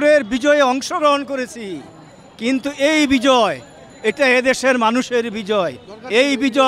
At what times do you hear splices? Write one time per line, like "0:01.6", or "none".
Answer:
none